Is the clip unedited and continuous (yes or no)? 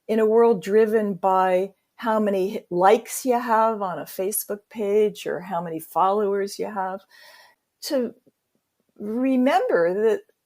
no